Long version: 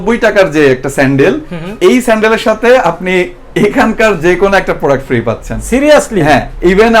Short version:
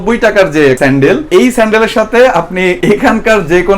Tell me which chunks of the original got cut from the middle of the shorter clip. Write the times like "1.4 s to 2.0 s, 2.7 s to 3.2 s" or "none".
0.9 s to 1.4 s, 3.3 s to 3.5 s